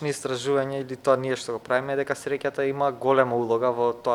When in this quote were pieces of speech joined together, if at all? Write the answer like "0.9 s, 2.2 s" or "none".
none